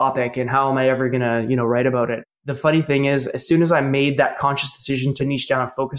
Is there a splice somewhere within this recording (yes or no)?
yes